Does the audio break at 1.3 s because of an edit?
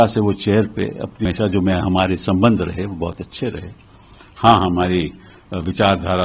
yes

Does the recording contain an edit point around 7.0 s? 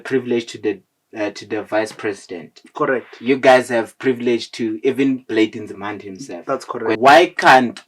yes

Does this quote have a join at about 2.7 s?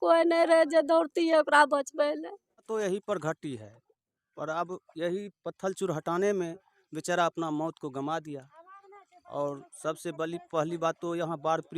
yes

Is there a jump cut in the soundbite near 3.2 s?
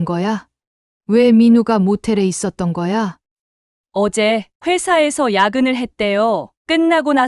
yes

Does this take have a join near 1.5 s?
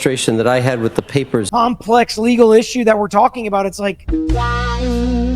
yes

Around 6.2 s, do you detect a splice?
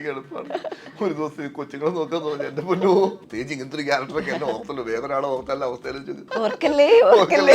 yes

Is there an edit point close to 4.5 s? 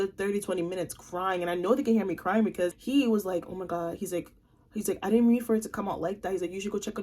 no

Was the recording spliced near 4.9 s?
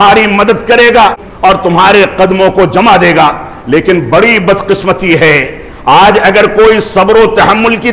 no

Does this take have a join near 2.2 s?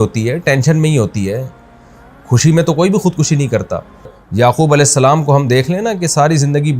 no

